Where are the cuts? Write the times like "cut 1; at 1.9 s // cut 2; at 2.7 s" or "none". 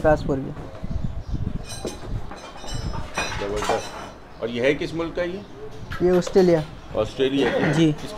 none